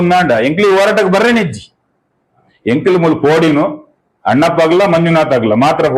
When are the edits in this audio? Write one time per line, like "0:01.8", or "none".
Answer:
0:02.4